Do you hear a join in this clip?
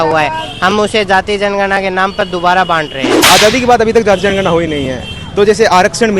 yes; 1 cut; at 3.1 s

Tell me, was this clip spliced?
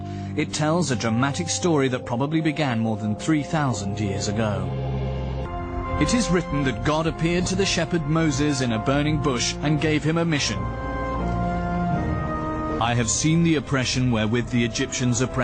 no; 0 cuts

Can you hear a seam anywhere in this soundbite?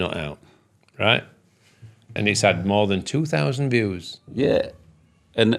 yes; 1 cut; at 2.1 s

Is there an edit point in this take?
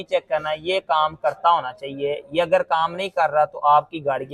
no; 0 cuts

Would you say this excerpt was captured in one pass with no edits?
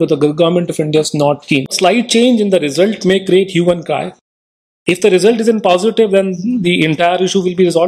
no; 1 cut; at 1.7 s

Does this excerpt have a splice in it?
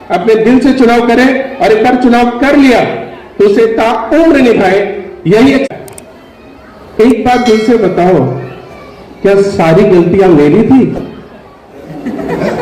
yes; 1 cut; at 5.7 s

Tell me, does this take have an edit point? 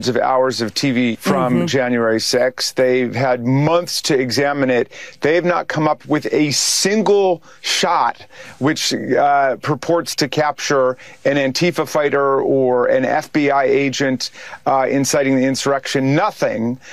yes; 1 cut; at 1.2 s

